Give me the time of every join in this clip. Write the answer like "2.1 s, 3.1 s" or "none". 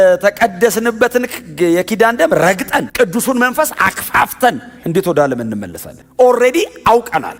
none